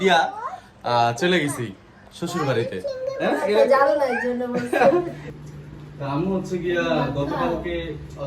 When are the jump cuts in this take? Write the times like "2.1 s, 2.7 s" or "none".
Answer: 5.2 s